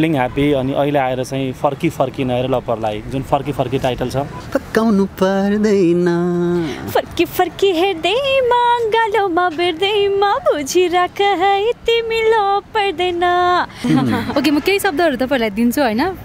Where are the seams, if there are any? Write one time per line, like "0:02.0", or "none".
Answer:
0:04.4
0:13.8